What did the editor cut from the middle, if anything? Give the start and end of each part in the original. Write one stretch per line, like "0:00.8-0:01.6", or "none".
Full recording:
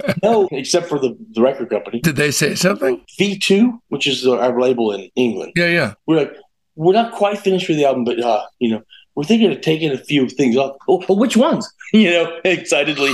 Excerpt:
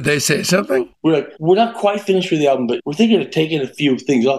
0:03.1-0:06.3
0:08.2-0:09.1